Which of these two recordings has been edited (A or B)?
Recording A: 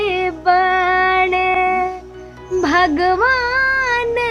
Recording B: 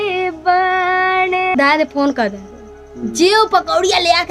B